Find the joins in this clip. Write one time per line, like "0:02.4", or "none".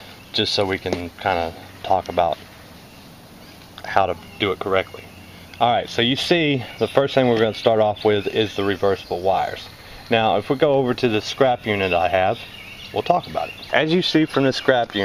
none